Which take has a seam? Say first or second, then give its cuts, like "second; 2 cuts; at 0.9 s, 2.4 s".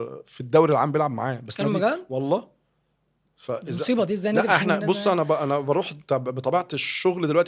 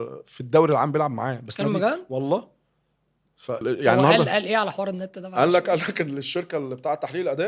second; 1 cut; at 3.6 s